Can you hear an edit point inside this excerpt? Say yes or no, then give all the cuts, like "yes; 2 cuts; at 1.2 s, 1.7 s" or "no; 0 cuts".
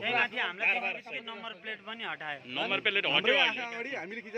no; 0 cuts